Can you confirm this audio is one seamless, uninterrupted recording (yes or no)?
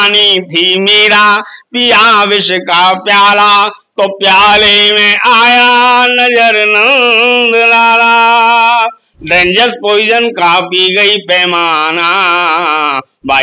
yes